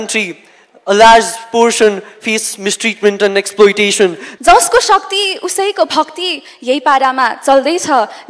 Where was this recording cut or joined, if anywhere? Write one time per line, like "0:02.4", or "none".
0:04.3